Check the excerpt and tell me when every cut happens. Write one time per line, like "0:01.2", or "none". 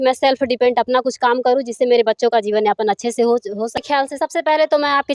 0:03.8